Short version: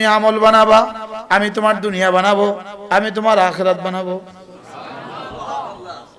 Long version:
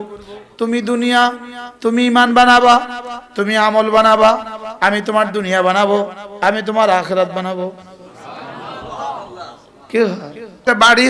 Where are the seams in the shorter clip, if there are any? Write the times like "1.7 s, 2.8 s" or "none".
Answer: none